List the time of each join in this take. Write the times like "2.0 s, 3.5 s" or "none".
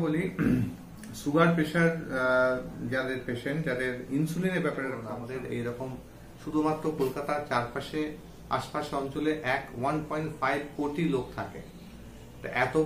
5.1 s